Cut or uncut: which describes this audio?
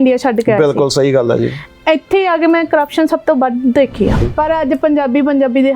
cut